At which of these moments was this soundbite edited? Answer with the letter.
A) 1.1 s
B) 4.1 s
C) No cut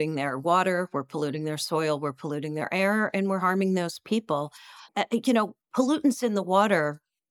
C